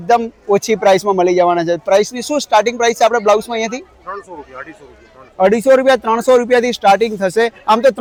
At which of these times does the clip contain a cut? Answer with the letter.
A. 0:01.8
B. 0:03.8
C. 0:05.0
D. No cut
D